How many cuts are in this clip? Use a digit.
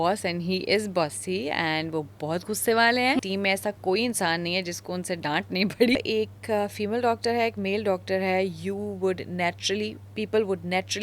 2